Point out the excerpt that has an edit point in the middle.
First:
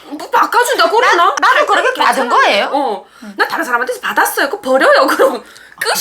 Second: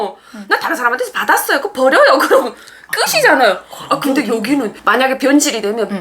second; 1 cut; at 4.8 s

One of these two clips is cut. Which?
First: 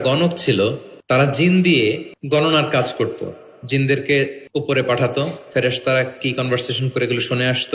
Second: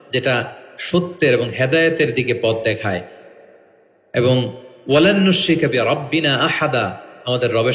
first; 3 cuts; at 0.9 s, 2.1 s, 4.4 s

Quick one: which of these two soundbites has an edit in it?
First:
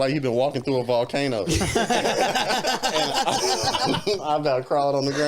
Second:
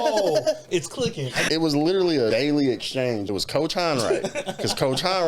second; 3 cuts; at 1.4 s, 2.3 s, 3.2 s

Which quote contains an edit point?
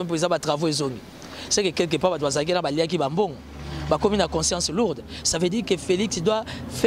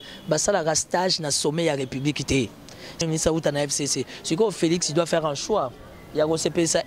second; 1 cut; at 3.0 s

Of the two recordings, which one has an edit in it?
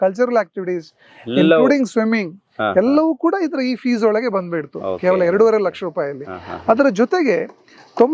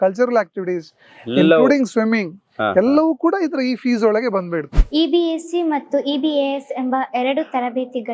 second; 1 cut; at 4.7 s

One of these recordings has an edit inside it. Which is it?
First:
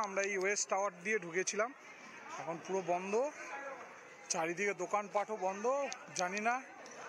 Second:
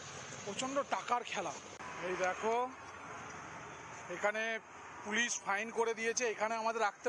second; 1 cut; at 1.8 s

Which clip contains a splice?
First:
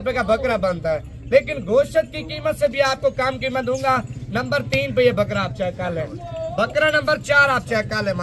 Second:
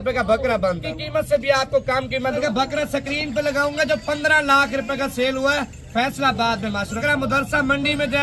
second; 3 cuts; at 0.9 s, 2.4 s, 7.0 s

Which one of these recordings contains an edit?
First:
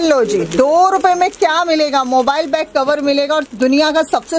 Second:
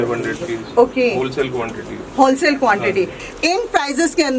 second; 1 cut; at 3.2 s

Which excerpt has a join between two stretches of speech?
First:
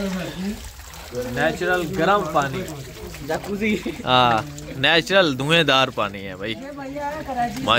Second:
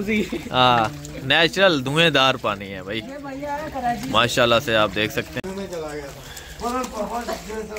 second; 1 cut; at 5.3 s

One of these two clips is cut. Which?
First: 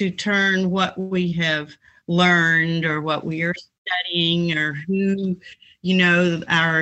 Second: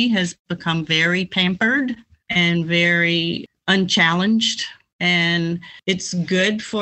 second; 4 cuts; at 2.1 s, 3.5 s, 4.8 s, 5.7 s

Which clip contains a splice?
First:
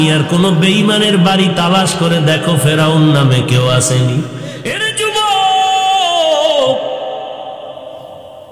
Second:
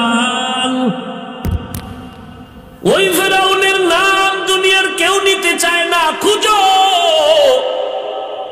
first; 1 cut; at 5.0 s

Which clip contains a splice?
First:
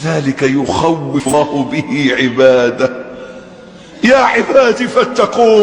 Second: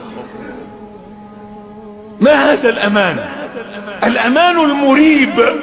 first; 1 cut; at 1.1 s

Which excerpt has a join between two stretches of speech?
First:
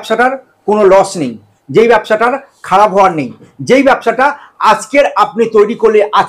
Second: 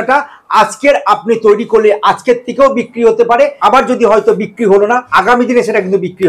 second; 2 cuts; at 3.6 s, 5.1 s

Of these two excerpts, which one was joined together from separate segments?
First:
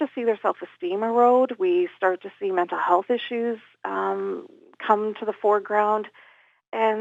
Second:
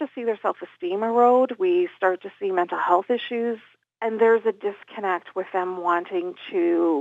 second; 1 cut; at 3.7 s

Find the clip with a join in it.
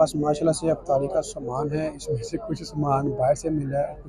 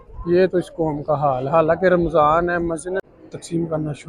second; 1 cut; at 3.1 s

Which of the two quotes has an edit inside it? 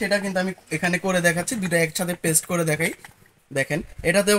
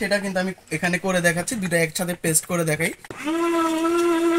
second; 1 cut; at 3.1 s

